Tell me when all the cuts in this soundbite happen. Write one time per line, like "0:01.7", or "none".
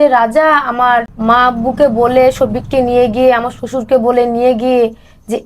0:01.1